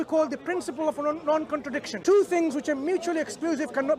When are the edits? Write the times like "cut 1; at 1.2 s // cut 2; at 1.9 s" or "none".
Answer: cut 1; at 1.9 s